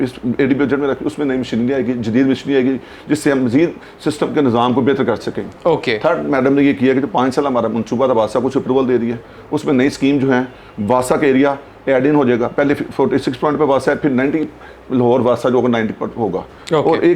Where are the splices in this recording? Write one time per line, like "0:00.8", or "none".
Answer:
none